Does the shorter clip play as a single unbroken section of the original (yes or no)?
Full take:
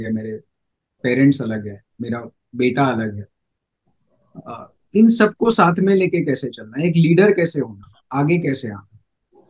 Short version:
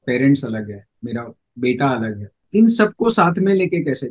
no